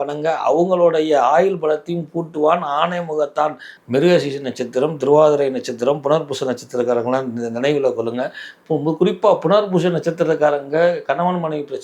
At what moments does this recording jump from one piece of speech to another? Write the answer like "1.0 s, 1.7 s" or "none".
3.7 s

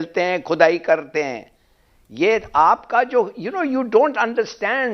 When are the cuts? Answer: none

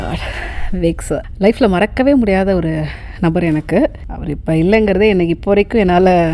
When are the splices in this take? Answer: 1.3 s, 4.1 s

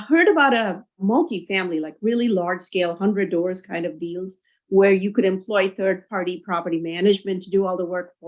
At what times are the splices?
none

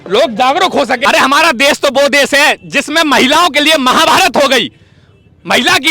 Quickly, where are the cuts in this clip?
1.0 s

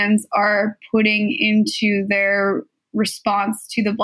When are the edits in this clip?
none

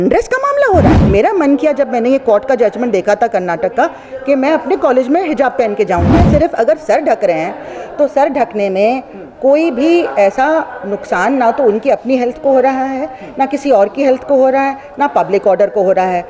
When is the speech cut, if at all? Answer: 1.0 s, 6.2 s

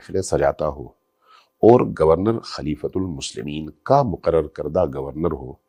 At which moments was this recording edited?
none

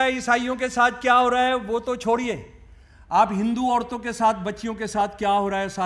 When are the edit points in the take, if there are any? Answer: none

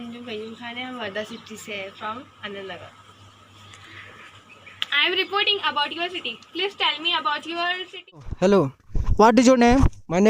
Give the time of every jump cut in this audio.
8.3 s

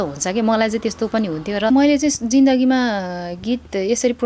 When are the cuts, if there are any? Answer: 1.7 s

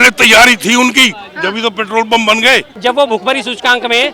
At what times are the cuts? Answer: 2.7 s

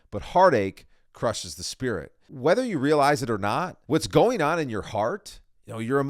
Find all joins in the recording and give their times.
2.2 s, 3.7 s

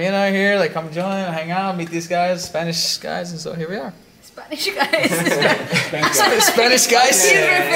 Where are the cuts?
none

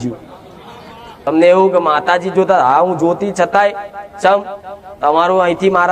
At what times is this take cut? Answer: 1.3 s

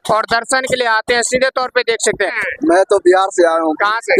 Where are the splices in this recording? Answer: 2.4 s

